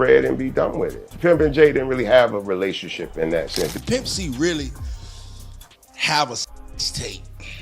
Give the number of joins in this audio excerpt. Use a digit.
2